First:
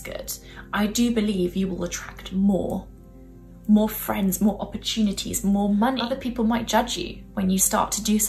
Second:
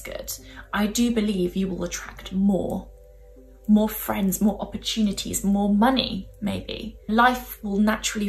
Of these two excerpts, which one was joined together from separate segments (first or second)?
first